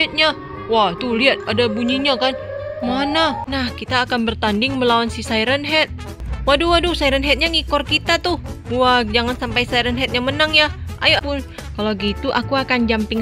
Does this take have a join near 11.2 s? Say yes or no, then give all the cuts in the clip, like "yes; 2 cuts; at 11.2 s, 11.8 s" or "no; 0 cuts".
yes; 2 cuts; at 3.4 s, 11.2 s